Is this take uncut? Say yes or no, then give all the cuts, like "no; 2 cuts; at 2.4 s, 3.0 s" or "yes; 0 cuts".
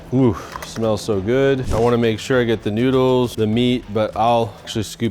no; 2 cuts; at 1.7 s, 3.3 s